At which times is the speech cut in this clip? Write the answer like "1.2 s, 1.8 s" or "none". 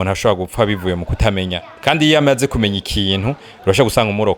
none

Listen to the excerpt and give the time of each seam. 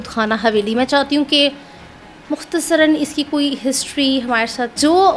none

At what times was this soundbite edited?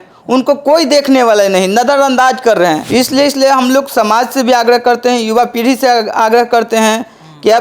2.8 s

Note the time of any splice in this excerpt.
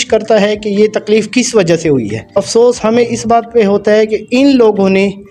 2.3 s

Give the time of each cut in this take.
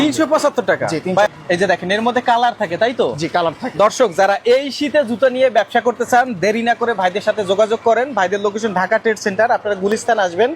1.3 s

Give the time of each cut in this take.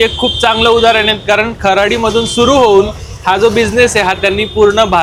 none

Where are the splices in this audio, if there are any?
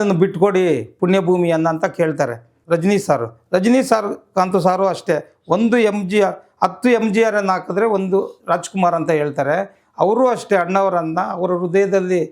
2.5 s

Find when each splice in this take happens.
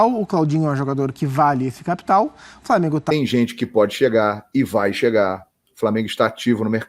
3.1 s

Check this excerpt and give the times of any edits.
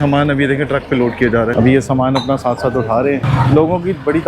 1.5 s, 3.3 s

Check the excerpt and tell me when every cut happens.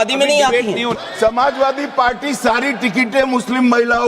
1.0 s

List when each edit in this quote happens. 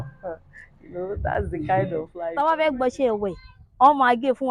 2.3 s

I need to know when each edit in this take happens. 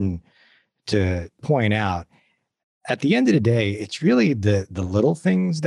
1.4 s

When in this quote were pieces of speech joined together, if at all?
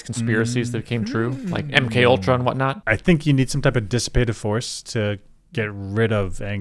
2.9 s

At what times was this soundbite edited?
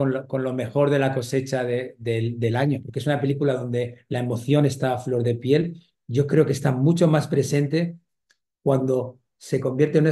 2.9 s

